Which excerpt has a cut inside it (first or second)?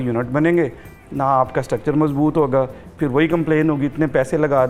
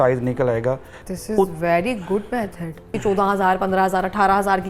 second